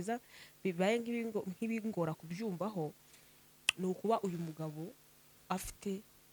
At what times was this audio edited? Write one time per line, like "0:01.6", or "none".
none

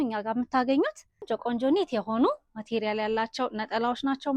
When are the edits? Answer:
0:01.1

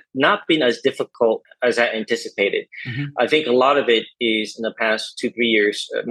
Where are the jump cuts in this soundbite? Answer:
none

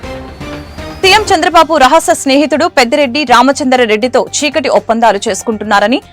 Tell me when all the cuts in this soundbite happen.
none

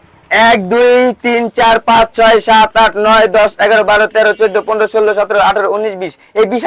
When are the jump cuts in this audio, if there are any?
none

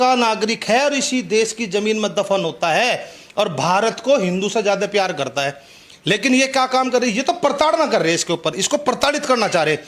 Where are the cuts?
none

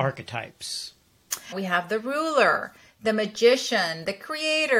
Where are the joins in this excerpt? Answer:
0:01.5

